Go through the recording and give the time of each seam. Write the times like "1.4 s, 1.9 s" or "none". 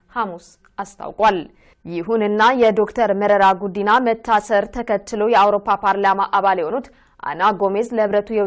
4.0 s